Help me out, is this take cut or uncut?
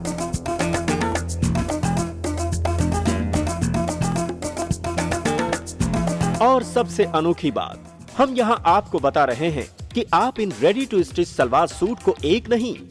cut